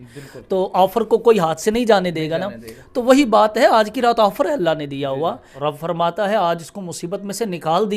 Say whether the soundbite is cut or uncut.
cut